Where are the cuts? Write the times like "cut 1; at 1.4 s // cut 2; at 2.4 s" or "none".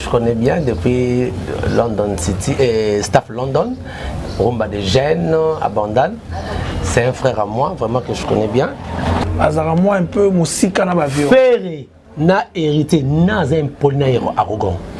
cut 1; at 9.2 s